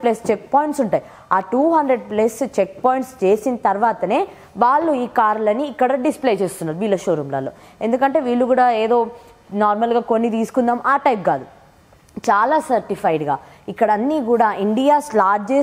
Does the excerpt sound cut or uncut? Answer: uncut